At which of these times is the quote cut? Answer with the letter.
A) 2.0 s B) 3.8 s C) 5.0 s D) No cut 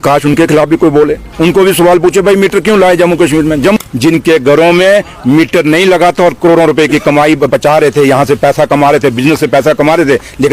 B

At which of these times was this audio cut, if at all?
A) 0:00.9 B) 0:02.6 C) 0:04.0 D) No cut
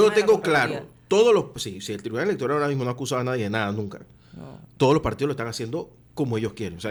D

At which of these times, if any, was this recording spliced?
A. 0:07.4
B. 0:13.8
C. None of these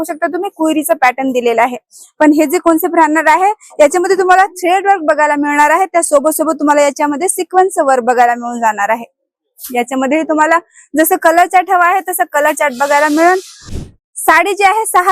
B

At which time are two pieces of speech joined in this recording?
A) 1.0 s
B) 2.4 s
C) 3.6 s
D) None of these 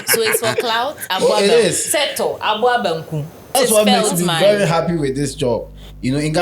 C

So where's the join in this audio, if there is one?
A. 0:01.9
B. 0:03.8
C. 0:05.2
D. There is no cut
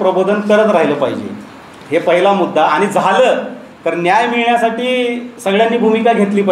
D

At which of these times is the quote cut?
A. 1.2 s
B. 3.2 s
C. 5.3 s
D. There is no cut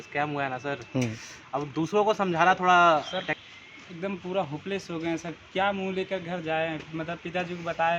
B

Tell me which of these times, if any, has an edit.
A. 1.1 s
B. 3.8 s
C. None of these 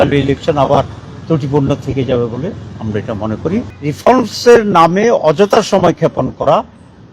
B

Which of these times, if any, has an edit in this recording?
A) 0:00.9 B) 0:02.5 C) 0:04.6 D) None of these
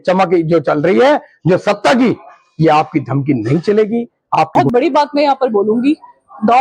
C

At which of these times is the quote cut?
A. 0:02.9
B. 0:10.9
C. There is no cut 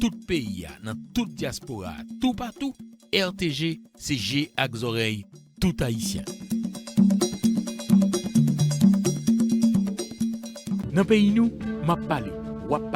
B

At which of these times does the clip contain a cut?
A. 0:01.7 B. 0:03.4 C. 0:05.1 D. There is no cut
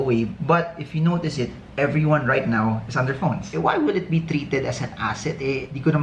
B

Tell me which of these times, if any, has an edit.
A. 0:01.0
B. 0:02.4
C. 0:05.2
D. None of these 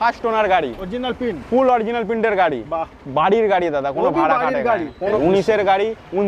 C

